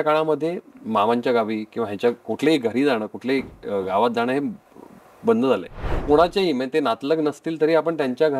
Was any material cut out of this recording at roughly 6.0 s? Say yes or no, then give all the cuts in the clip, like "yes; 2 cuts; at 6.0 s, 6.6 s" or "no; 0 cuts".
yes; 1 cut; at 6.0 s